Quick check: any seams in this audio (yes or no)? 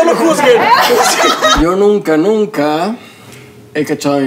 yes